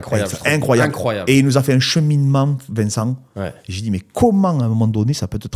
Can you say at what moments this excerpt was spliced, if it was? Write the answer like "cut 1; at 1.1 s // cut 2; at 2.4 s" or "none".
none